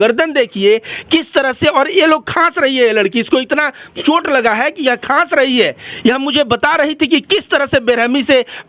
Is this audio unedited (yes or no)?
yes